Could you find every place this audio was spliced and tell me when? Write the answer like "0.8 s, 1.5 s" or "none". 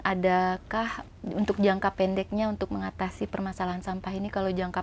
1.0 s